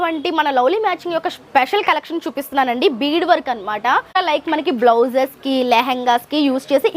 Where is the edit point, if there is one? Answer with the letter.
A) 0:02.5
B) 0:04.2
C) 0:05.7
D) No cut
B